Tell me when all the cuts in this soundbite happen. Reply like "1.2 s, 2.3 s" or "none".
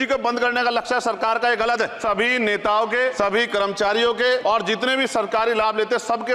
2.0 s, 3.1 s, 4.4 s